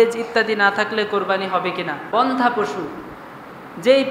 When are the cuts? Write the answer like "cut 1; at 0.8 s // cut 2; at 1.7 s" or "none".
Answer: cut 1; at 2.1 s